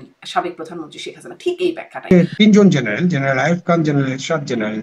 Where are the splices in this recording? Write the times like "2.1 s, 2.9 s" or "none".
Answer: 2.1 s